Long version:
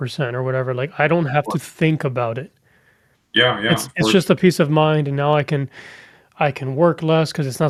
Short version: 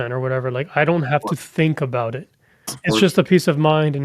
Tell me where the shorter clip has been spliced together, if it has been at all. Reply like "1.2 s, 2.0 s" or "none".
2.8 s